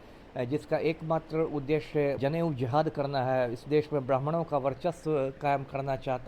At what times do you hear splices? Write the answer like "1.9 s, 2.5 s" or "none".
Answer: 2.2 s